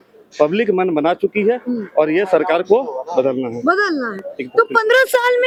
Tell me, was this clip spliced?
no; 0 cuts

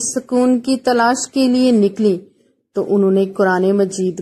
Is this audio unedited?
yes; 0 cuts

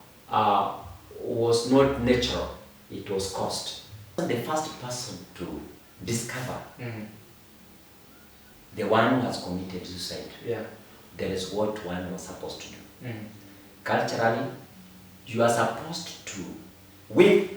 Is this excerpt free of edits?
no; 1 cut; at 4.2 s

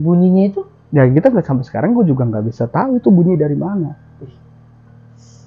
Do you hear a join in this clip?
no; 0 cuts

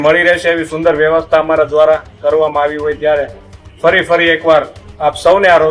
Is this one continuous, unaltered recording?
yes; 0 cuts

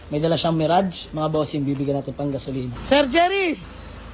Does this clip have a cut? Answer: yes; 1 cut; at 2.7 s

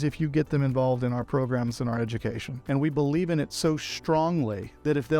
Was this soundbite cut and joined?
yes; 1 cut; at 2.5 s

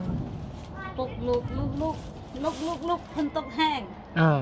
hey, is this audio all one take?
yes; 0 cuts

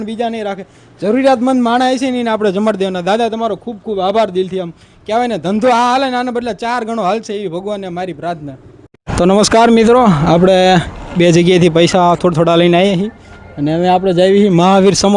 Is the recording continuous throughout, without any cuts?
yes; 0 cuts

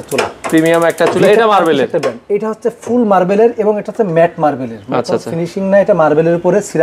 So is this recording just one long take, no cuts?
yes; 0 cuts

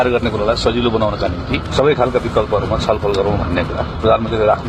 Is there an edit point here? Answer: yes; 1 cut; at 1.6 s

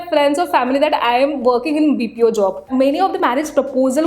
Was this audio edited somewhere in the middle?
yes; 1 cut; at 2.7 s

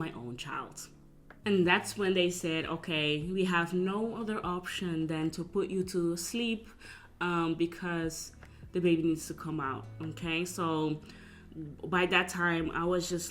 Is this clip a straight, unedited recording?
no; 1 cut; at 1.3 s

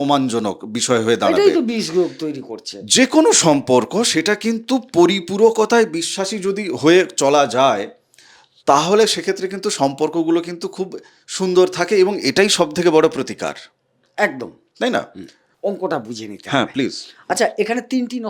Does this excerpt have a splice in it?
yes; 1 cut; at 15.5 s

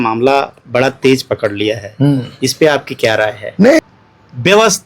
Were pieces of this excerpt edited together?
yes; 1 cut; at 3.8 s

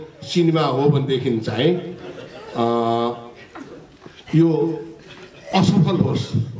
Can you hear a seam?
no; 0 cuts

